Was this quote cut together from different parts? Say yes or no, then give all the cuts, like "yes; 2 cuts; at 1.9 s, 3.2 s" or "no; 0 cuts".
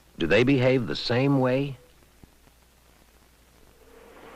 no; 0 cuts